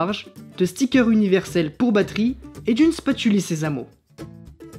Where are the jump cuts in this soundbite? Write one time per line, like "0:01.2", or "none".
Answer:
0:03.9